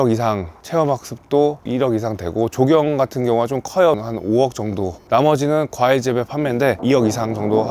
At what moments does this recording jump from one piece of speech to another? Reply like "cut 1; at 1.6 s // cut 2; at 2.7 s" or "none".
cut 1; at 4.0 s // cut 2; at 6.8 s